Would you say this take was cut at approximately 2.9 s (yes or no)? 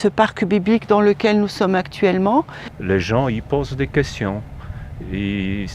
yes